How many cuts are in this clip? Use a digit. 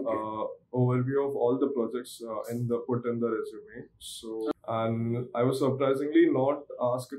1